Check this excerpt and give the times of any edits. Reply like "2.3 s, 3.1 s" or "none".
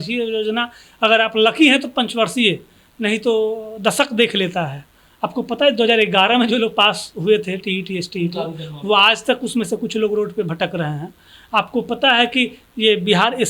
none